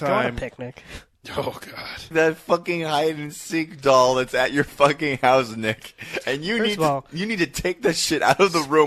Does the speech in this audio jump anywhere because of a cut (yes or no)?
yes